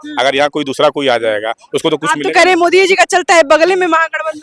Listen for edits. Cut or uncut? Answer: uncut